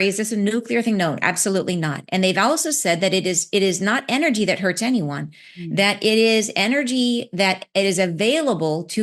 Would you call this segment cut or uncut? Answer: uncut